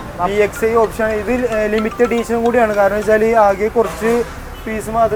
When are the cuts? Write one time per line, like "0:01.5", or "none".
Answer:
none